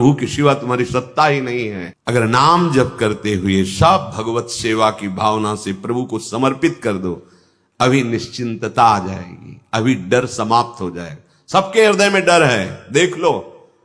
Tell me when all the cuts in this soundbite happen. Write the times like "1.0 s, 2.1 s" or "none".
1.8 s